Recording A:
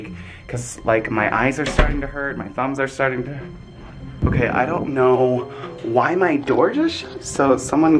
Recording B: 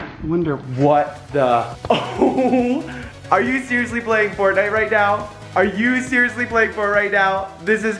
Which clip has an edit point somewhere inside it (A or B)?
A